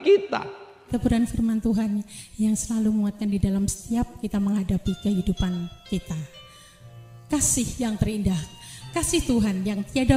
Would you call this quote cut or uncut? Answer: cut